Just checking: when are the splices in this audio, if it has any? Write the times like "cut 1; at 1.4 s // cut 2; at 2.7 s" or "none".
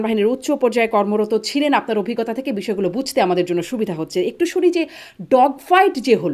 none